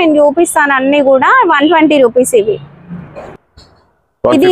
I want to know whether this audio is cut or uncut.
uncut